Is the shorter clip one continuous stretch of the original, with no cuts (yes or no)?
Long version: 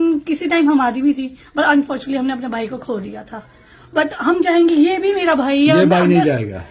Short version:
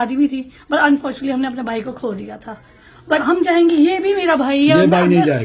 no